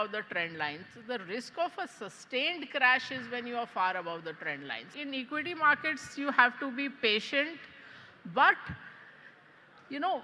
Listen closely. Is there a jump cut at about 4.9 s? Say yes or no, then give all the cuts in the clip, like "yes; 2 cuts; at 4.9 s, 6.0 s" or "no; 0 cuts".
yes; 1 cut; at 4.9 s